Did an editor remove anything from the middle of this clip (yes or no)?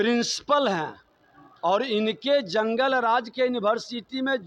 no